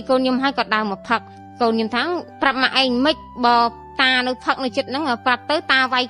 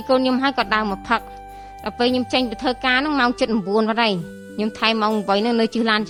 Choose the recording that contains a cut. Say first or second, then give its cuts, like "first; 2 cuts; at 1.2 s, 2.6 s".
first; 1 cut; at 1.4 s